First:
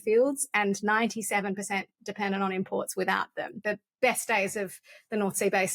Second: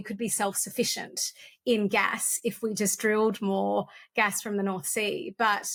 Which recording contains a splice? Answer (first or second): first